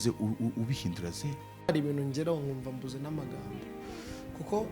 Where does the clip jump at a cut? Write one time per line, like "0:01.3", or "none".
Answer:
0:01.7